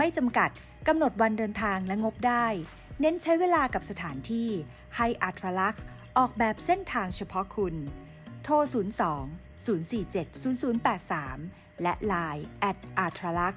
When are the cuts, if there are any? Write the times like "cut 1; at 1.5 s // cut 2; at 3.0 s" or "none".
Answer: none